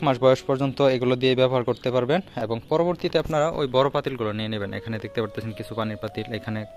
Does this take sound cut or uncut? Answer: uncut